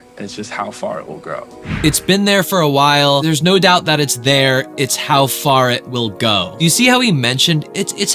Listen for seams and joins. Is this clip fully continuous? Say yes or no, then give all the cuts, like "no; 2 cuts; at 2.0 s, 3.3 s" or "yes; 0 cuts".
no; 1 cut; at 1.8 s